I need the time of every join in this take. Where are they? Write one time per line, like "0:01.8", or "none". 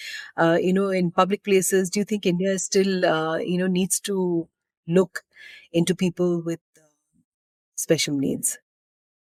none